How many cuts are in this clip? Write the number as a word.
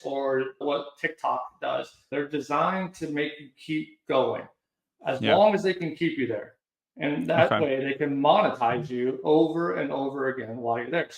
one